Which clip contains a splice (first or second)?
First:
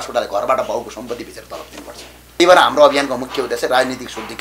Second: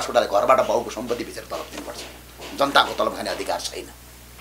first